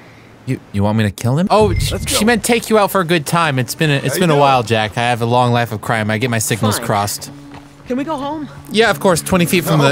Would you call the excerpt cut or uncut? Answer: uncut